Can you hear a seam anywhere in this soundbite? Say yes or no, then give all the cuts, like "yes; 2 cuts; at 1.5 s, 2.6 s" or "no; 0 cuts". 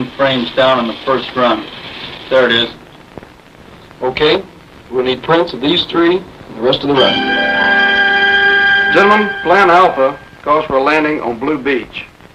no; 0 cuts